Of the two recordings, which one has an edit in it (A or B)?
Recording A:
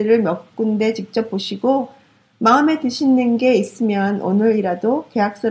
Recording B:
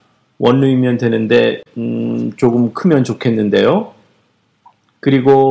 B